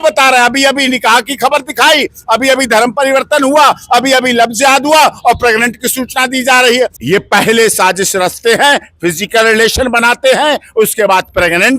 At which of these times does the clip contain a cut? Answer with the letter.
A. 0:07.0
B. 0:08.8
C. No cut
A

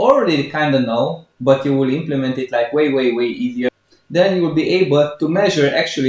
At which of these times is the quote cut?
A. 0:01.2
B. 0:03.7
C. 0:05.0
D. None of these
B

